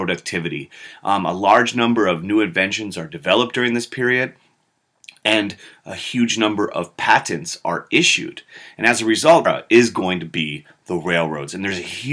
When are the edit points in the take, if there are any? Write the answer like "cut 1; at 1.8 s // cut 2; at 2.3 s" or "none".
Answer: none